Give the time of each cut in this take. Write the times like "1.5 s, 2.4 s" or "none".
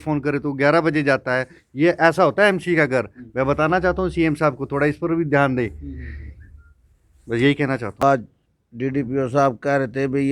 8.0 s

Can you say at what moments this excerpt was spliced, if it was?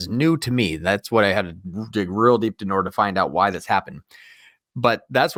none

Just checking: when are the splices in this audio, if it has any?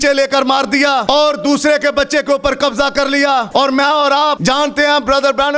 1.0 s, 3.5 s, 4.4 s

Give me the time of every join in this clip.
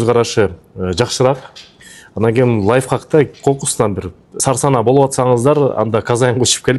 4.2 s

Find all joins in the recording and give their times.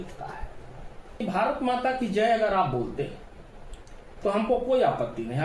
1.2 s

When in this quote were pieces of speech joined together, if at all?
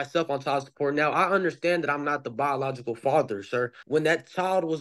3.8 s

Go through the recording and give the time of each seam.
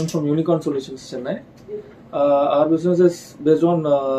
none

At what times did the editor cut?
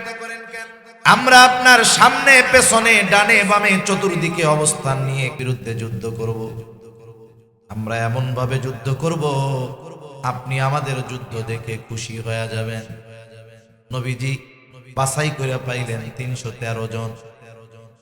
5.3 s

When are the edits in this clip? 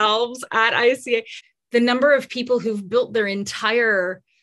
1.4 s

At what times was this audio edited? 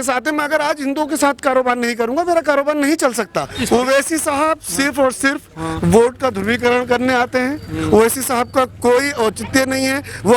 3.5 s

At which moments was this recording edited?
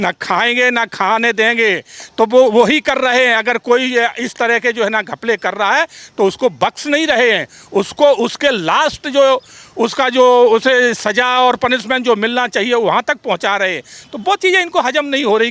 none

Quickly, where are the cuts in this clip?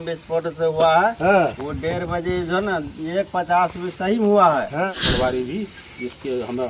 4.9 s

